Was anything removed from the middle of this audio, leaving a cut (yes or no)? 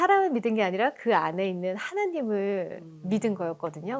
no